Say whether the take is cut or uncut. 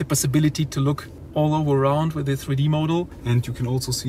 cut